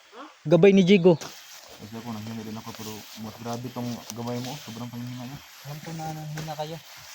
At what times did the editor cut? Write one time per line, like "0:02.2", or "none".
0:01.4